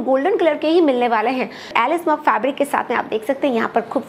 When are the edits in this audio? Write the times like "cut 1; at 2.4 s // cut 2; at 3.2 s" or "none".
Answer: cut 1; at 1.7 s